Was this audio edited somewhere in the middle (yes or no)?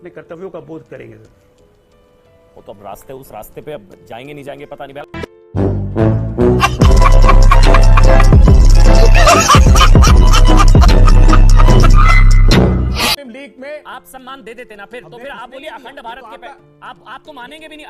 yes